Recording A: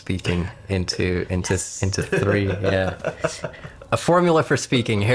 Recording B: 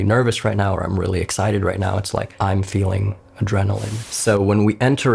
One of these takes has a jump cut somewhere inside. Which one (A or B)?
B